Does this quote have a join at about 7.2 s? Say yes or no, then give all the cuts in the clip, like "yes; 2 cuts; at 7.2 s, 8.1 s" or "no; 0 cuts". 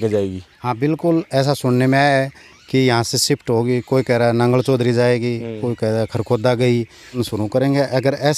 yes; 1 cut; at 7.2 s